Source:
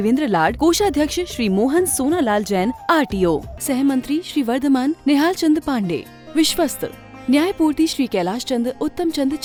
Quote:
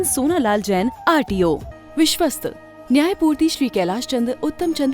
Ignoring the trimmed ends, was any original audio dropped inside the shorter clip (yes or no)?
yes